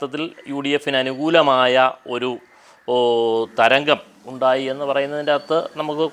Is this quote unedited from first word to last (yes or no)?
yes